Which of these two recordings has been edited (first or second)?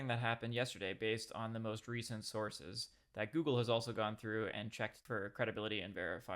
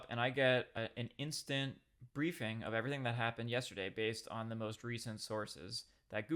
first